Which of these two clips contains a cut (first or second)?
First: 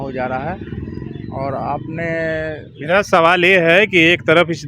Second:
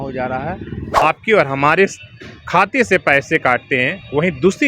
second